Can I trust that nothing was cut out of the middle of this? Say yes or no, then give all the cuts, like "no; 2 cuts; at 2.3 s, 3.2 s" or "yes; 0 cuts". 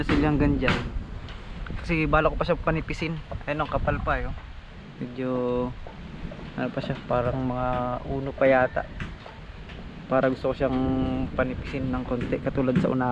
yes; 0 cuts